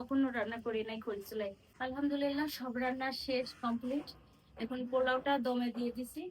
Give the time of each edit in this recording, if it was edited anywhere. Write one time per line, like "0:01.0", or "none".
0:01.7